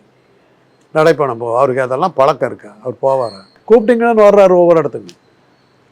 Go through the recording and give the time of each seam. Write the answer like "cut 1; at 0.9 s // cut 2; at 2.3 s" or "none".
cut 1; at 3.5 s